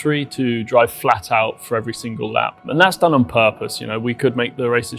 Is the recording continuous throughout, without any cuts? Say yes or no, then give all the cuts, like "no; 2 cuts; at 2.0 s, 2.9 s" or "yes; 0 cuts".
no; 1 cut; at 2.7 s